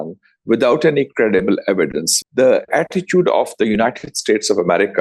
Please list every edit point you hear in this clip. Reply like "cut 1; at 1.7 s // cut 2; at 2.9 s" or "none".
cut 1; at 2.1 s